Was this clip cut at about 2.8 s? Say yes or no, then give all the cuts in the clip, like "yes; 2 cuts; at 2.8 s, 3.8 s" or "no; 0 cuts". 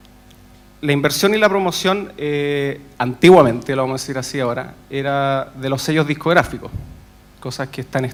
no; 0 cuts